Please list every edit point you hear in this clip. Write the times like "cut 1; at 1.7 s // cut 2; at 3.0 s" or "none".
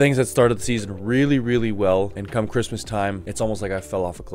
none